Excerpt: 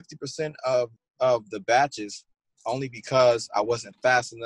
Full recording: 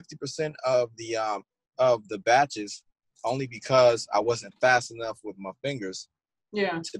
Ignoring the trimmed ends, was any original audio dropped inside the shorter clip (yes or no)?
yes